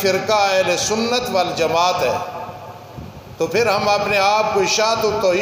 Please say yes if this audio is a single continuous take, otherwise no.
yes